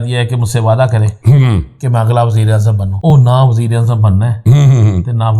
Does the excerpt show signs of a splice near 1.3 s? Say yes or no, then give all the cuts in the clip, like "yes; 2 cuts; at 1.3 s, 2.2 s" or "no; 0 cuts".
no; 1 cut; at 3.1 s